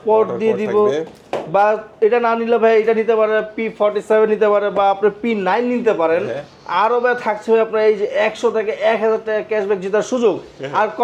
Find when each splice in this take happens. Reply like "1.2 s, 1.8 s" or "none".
none